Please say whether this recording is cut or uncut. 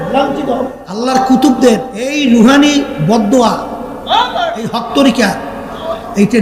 cut